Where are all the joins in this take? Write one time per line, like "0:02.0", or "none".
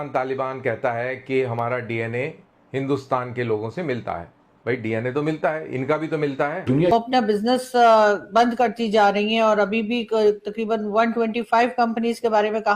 0:06.8

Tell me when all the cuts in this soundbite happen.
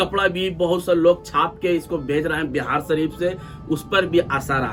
none

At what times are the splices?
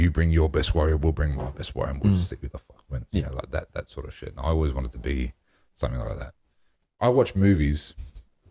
0:06.9

